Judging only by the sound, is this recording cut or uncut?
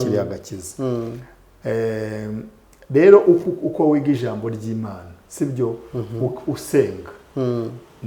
uncut